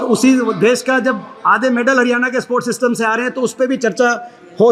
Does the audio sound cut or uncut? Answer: uncut